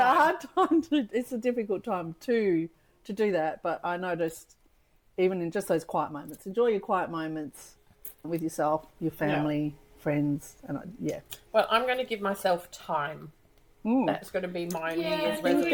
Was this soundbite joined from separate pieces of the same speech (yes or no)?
no